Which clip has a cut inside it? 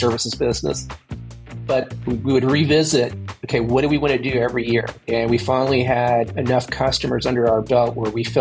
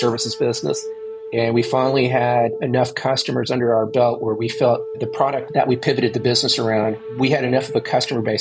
second; 3 cuts; at 1.2 s, 5.2 s, 7.0 s

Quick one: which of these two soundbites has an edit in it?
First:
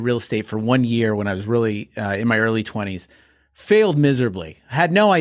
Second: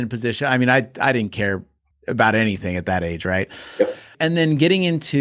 second; 1 cut; at 4.1 s

